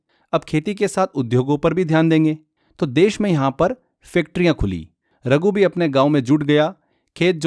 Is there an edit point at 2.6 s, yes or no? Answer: no